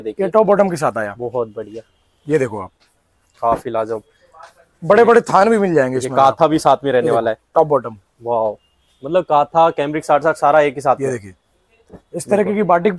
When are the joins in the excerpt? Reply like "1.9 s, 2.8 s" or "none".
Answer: none